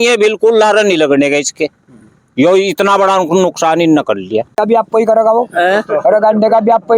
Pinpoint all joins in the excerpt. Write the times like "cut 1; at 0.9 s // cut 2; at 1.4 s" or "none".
cut 1; at 4.6 s